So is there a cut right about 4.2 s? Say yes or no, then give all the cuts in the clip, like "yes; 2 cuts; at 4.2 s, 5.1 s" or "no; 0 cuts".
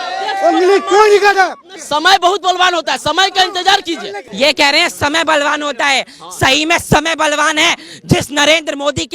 yes; 1 cut; at 4.2 s